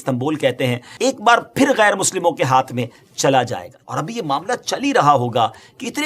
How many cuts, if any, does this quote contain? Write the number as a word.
two